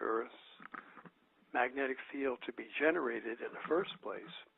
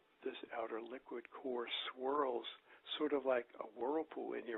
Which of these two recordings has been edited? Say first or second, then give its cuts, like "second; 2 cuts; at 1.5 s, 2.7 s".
first; 1 cut; at 2.5 s